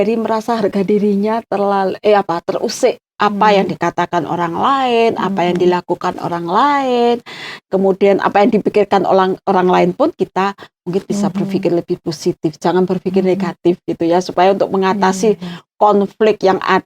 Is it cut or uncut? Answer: cut